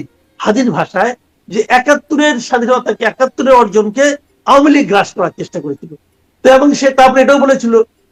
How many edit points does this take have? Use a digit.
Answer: 0